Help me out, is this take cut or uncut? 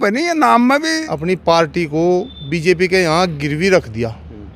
cut